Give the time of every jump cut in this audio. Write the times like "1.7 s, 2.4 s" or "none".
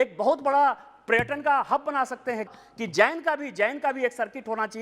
2.5 s